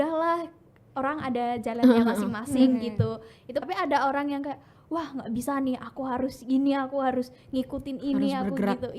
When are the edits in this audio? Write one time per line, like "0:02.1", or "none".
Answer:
0:03.6